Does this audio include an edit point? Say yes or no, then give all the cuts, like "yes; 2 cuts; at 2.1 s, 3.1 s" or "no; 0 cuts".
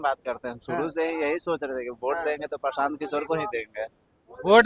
no; 0 cuts